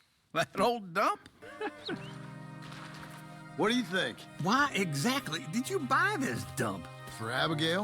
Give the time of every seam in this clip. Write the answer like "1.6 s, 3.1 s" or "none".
1.4 s